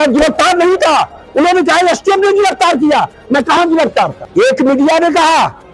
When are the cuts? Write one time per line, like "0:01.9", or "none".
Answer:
0:04.2